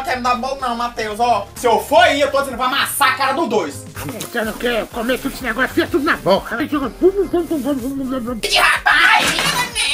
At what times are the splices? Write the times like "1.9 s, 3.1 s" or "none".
3.9 s, 6.6 s, 8.4 s